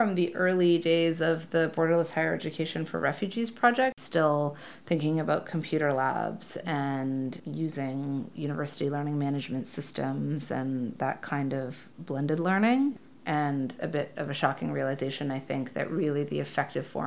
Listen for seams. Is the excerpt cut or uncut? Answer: cut